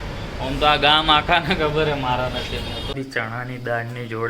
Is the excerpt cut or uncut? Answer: cut